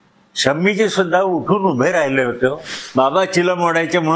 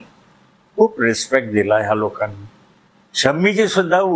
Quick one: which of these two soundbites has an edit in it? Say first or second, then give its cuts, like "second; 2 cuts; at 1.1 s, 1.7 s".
first; 1 cut; at 2.7 s